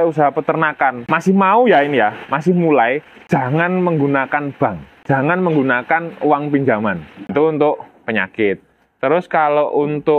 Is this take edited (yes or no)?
yes